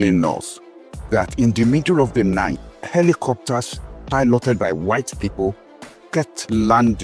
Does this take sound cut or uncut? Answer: uncut